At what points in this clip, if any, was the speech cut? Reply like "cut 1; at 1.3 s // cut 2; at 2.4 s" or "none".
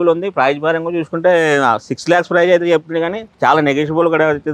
none